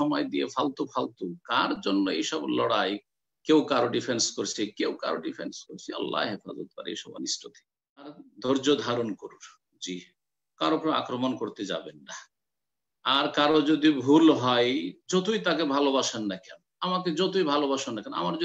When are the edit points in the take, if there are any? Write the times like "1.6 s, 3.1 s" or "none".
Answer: 8.3 s